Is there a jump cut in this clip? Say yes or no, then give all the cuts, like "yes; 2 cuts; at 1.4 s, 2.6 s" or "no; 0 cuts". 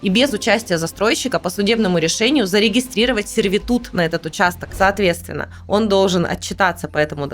yes; 1 cut; at 4.6 s